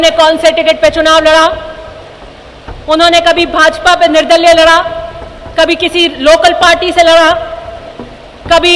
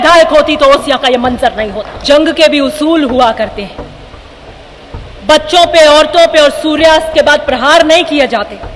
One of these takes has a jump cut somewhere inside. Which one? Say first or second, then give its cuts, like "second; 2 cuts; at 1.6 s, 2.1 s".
second; 1 cut; at 1.9 s